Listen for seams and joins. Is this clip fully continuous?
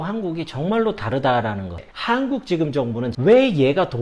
no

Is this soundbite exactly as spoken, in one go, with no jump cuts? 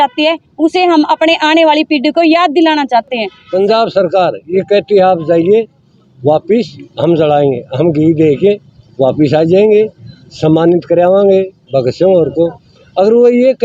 no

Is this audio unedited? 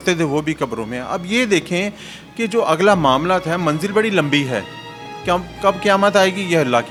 yes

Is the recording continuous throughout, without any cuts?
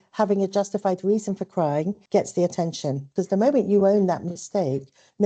no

